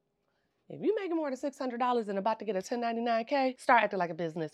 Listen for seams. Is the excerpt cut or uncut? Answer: cut